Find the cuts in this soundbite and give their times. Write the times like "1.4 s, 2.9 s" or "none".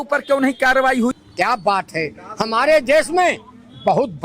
1.1 s